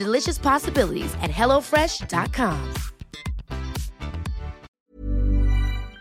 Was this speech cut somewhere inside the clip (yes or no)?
yes